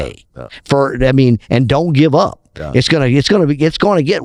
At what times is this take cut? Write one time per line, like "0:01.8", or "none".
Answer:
none